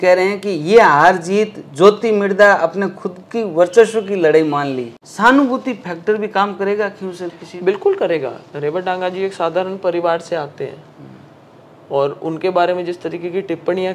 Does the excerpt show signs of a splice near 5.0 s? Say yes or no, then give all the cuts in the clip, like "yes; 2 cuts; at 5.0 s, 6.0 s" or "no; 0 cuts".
yes; 1 cut; at 5.0 s